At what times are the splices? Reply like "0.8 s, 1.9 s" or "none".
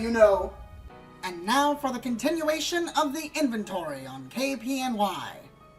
2.0 s